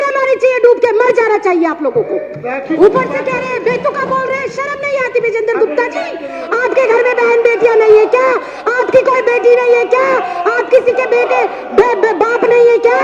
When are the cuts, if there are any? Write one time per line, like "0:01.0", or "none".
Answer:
0:02.8